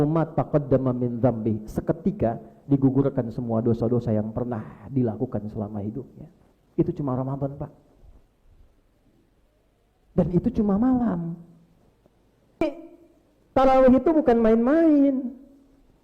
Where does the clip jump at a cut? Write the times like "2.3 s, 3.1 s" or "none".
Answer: 12.6 s